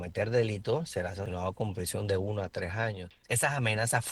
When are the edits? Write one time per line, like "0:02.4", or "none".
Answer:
0:01.2
0:03.1